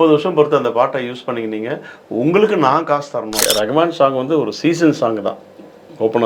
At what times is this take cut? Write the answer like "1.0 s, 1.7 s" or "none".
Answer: 3.4 s